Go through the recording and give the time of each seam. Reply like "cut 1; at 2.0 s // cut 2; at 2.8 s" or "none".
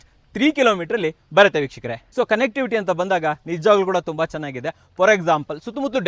none

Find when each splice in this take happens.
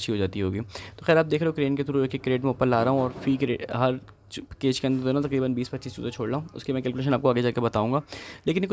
none

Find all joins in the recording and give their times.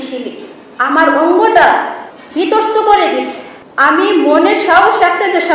cut 1; at 1.9 s

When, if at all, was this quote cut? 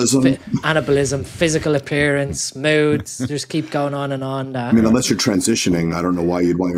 none

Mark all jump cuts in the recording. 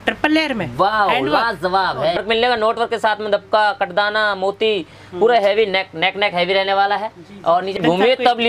cut 1; at 2.2 s // cut 2; at 7.8 s

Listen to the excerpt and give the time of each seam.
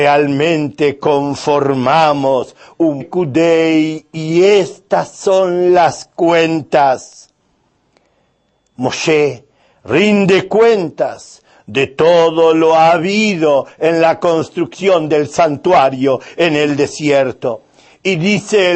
none

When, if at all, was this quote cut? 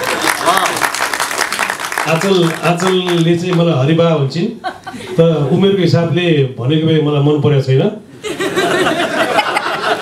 none

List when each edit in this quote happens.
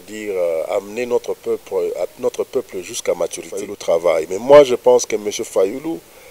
cut 1; at 3.7 s

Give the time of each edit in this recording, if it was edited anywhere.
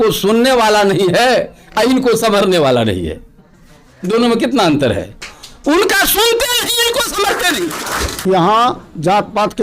cut 1; at 8.1 s

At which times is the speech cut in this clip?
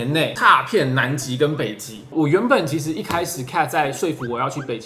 cut 1; at 1.9 s

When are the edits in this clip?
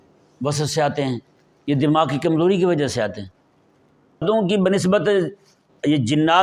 cut 1; at 4.2 s

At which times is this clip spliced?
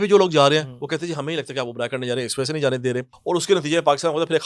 cut 1; at 3.1 s

